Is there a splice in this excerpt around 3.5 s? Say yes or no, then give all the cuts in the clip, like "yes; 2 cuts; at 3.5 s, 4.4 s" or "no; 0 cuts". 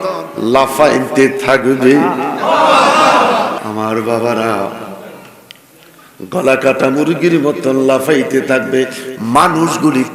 yes; 1 cut; at 3.5 s